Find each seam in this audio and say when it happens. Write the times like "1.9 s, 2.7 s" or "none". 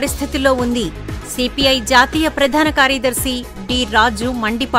none